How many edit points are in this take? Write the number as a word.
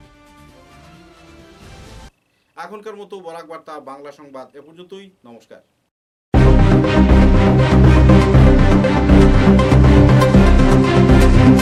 zero